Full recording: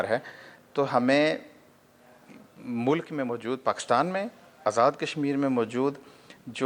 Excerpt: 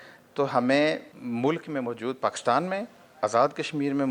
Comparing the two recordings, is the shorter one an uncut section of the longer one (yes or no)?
no